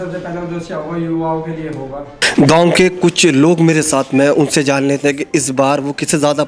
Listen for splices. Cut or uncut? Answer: uncut